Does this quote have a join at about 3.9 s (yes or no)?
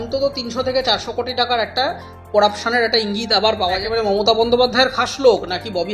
yes